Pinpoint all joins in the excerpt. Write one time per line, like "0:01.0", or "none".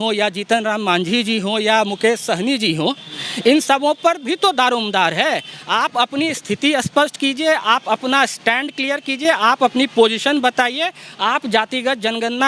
none